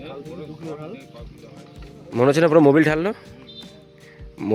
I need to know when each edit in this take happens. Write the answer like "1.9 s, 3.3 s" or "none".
none